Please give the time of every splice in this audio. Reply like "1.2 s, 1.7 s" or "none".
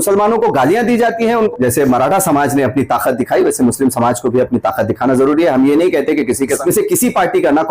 1.5 s, 6.6 s